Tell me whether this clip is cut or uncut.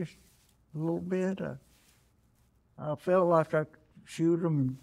uncut